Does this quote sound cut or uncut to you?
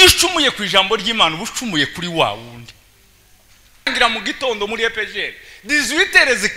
cut